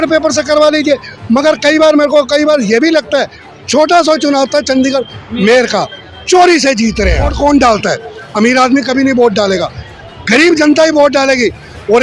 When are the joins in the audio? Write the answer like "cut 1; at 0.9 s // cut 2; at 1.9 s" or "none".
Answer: cut 1; at 7.3 s